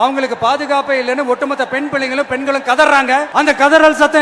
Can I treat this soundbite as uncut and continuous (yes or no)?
no